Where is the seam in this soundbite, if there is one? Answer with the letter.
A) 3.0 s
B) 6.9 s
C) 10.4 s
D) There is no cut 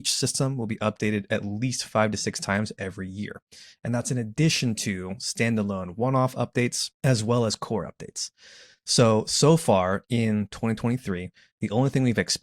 B